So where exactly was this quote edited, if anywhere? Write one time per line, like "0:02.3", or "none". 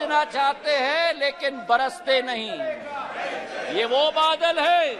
none